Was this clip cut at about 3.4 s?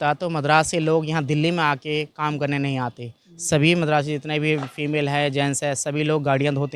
no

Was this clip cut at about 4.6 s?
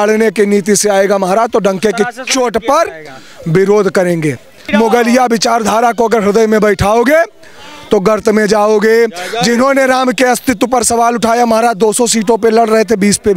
yes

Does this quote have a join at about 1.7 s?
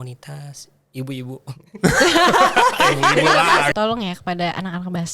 no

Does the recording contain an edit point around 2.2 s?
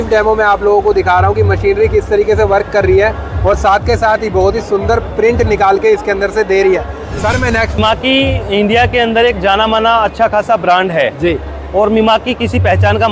no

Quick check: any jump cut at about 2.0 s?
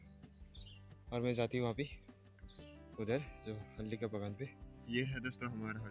no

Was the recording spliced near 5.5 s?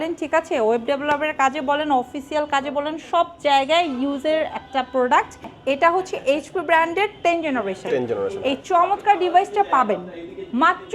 yes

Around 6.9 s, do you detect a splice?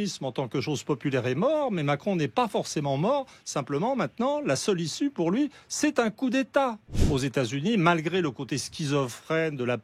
yes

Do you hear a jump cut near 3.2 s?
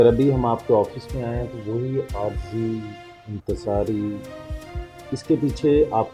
no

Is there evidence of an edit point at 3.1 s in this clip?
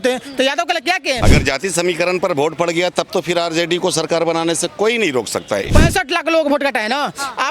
no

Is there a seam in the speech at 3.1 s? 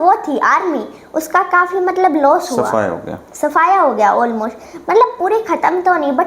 no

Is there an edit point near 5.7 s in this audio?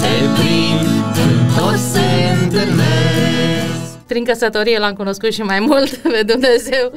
no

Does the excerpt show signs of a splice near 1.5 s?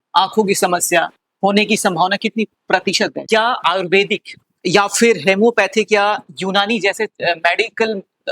no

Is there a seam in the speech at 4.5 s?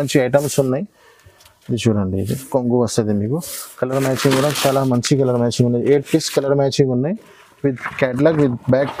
no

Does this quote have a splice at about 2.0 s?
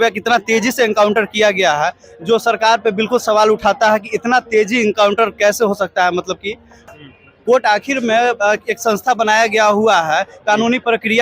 no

